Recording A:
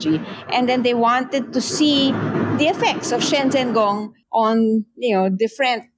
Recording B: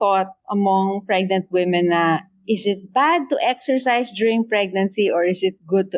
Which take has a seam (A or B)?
A